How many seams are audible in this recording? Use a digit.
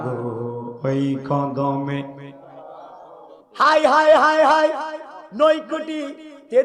1